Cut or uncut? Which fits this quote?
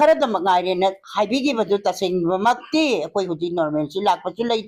uncut